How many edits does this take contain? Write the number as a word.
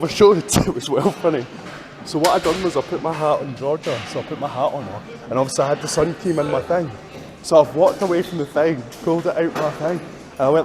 zero